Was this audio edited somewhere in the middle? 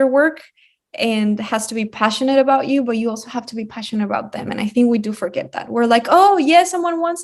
no; 0 cuts

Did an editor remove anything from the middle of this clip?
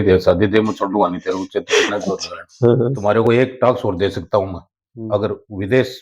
yes; 1 cut; at 3.0 s

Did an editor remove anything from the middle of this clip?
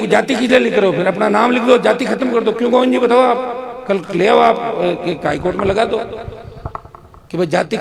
no; 0 cuts

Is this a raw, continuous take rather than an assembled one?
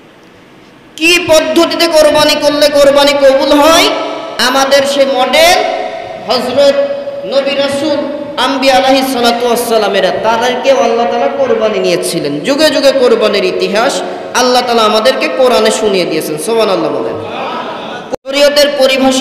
no; 1 cut; at 17.9 s

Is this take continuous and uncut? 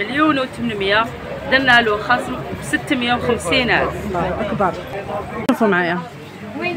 no; 1 cut; at 5.5 s

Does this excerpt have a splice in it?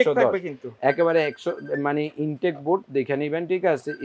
no; 0 cuts

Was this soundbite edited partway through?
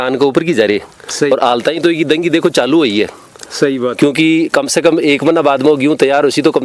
yes; 1 cut; at 1.3 s

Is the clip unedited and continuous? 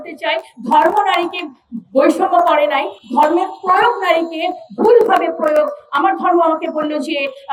yes; 0 cuts

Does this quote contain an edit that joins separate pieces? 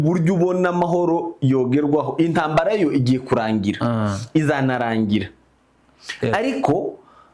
no; 0 cuts

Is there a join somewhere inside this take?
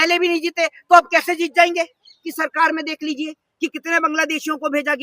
yes; 1 cut; at 2.3 s

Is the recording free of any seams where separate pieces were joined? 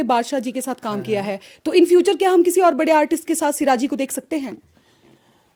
yes; 0 cuts

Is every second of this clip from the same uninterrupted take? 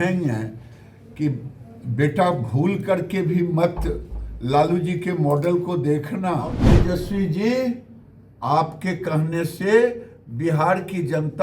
no; 1 cut; at 6.7 s

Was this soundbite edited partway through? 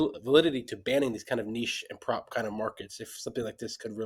no; 0 cuts

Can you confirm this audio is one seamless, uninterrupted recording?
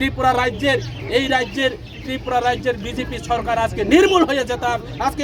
yes; 0 cuts

